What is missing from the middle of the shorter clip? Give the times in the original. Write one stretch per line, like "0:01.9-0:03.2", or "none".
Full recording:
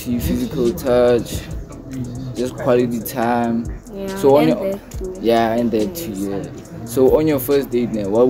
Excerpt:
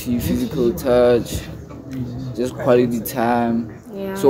none